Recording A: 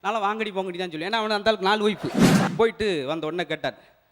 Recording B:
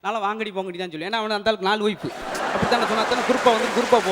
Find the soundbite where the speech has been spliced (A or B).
A